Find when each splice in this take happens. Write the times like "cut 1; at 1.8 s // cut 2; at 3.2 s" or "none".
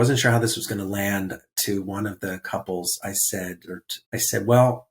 cut 1; at 3.9 s